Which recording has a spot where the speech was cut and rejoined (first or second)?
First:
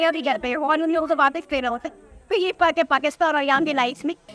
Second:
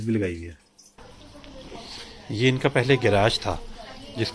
second